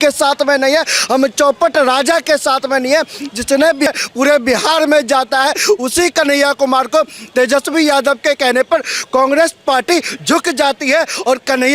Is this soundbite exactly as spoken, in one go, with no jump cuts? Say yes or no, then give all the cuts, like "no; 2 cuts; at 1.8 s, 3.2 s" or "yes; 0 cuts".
no; 1 cut; at 3.9 s